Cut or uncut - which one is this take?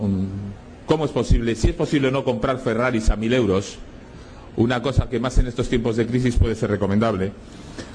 cut